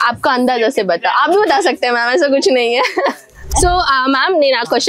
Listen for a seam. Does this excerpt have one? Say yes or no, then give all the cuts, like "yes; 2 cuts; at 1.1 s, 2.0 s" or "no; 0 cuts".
yes; 1 cut; at 3.5 s